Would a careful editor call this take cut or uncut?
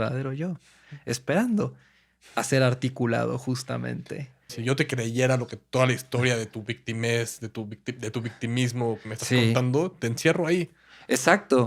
cut